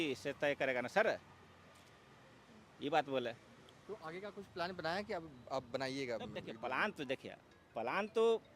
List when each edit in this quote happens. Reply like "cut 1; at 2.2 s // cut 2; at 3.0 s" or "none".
none